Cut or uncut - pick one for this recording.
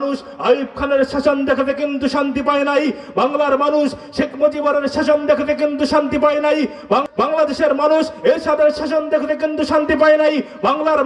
cut